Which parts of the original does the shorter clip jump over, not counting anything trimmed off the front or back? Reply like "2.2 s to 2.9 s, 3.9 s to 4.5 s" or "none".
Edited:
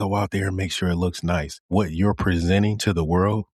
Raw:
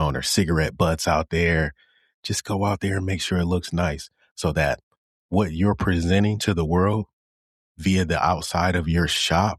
4.0 s to 5.2 s